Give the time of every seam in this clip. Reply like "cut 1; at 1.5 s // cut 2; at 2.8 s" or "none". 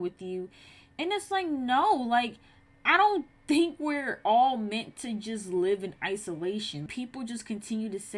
cut 1; at 6.9 s

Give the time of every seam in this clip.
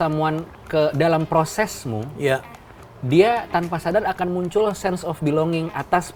none

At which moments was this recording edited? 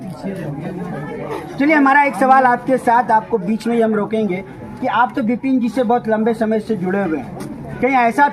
none

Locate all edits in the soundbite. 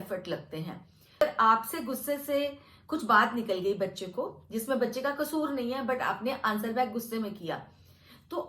cut 1; at 1.2 s

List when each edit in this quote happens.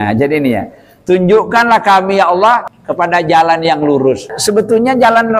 cut 1; at 2.8 s // cut 2; at 4.3 s

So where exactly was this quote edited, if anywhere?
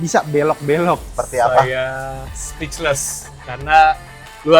cut 1; at 1.1 s

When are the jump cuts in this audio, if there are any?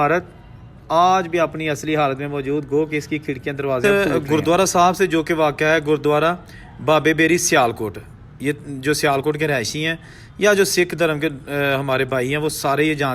cut 1; at 3.8 s

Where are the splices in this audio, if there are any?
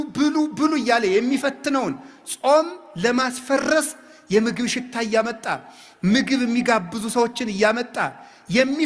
none

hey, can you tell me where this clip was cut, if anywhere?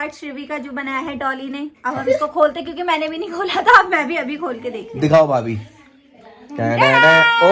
none

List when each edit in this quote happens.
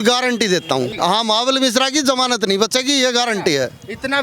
cut 1; at 0.9 s

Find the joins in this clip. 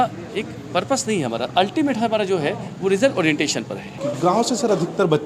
cut 1; at 4.0 s

